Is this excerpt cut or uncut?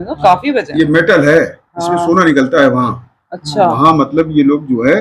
uncut